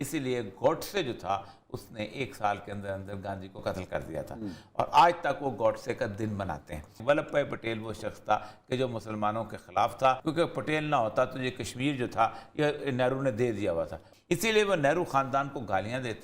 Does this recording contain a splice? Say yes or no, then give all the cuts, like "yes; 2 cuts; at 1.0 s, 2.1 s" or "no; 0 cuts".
yes; 3 cuts; at 7.0 s, 10.2 s, 14.1 s